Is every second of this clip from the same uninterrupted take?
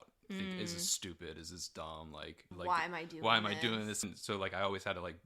no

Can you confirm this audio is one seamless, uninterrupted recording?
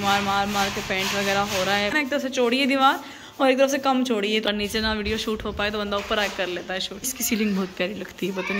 no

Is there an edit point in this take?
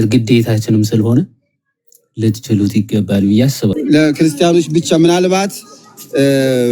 yes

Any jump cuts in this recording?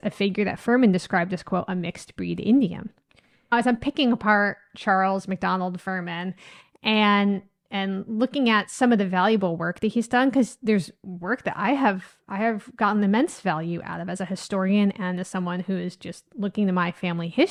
no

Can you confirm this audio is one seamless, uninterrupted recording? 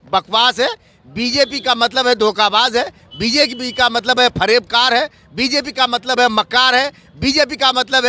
yes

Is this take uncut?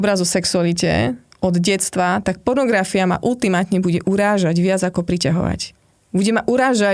yes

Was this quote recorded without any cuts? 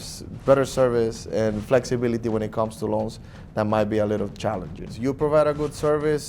no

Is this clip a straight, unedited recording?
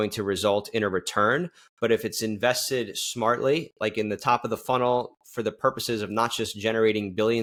yes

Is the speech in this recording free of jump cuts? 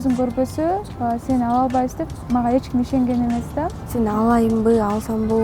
no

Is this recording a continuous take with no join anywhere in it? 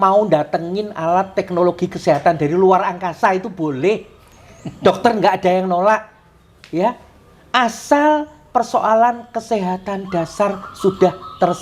yes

